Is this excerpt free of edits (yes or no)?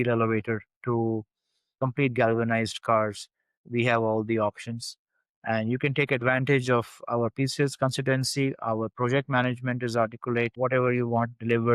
no